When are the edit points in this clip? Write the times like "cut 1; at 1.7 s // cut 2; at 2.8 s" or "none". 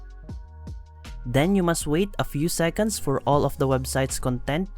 cut 1; at 1.2 s